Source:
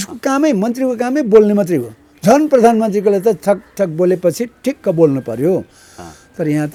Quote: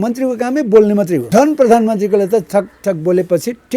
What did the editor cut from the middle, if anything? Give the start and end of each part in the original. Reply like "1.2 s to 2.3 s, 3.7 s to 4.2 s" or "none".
1.8 s to 2.1 s